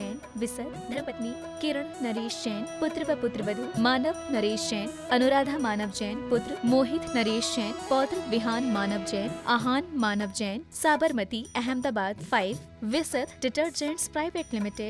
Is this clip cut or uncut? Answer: cut